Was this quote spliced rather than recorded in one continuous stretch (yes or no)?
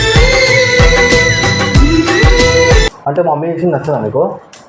yes